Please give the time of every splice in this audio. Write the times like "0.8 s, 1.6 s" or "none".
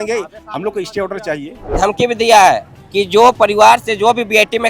1.8 s